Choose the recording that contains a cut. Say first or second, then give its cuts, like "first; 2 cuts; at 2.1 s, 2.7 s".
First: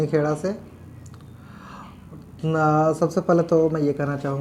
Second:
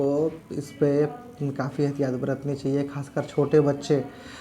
second; 1 cut; at 0.9 s